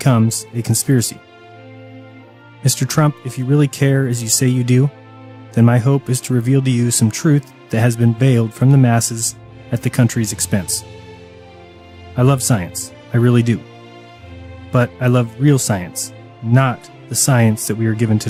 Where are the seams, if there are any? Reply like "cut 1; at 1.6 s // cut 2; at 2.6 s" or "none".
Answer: none